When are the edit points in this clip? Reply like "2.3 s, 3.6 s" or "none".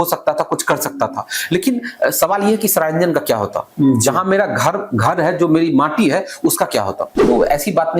7.1 s